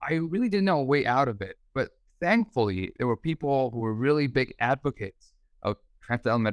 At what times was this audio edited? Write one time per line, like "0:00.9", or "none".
none